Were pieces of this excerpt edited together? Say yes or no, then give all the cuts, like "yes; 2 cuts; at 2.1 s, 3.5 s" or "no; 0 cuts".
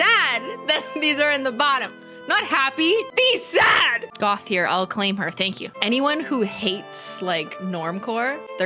no; 0 cuts